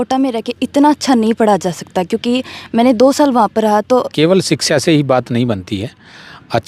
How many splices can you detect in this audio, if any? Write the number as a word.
one